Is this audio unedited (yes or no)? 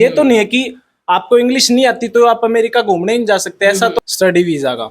no